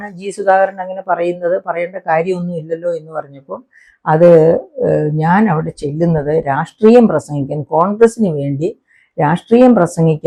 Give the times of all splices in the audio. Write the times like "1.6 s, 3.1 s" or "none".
none